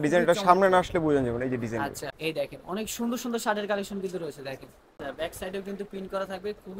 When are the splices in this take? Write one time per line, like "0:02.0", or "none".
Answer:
0:02.1
0:04.9